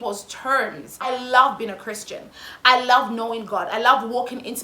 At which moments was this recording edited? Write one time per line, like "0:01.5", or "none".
0:01.1